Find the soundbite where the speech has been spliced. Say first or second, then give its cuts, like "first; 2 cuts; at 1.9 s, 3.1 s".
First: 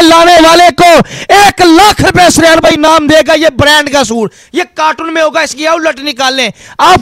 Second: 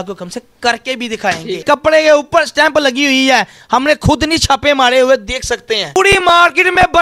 second; 2 cuts; at 1.6 s, 6.0 s